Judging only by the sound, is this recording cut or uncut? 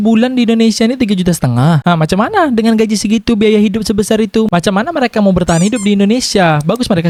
uncut